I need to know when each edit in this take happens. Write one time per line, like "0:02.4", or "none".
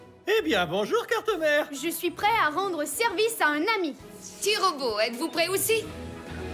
0:05.6